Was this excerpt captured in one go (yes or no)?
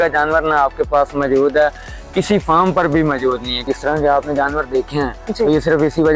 no